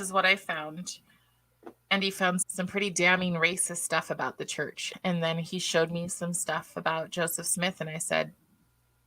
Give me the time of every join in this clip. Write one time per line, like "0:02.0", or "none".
0:02.4
0:04.8